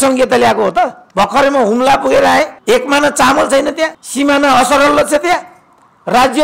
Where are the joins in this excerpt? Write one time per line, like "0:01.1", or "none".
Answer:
0:01.0
0:02.6
0:04.0

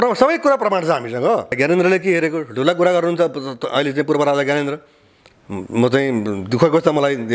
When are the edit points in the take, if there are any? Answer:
0:01.6

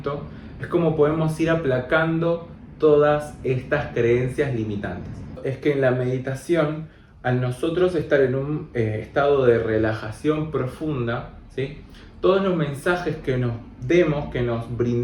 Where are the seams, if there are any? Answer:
0:05.3

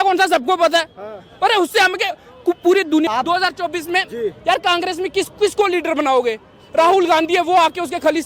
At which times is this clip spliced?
0:03.1

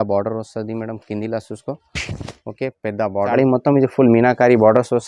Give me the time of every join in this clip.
0:03.3

